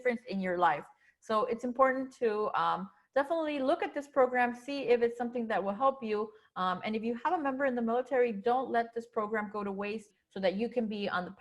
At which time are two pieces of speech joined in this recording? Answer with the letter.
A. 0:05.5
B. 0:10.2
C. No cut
B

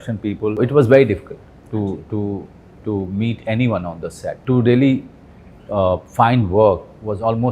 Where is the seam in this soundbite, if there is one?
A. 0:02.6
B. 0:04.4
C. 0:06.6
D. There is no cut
B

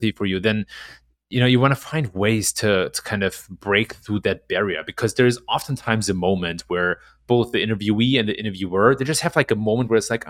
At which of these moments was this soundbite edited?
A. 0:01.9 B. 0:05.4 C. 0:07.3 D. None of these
D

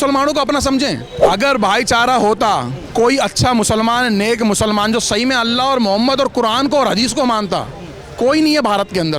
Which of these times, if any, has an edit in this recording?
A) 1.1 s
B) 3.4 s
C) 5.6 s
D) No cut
A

